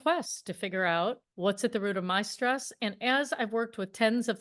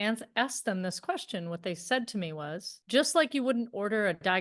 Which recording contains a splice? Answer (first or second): second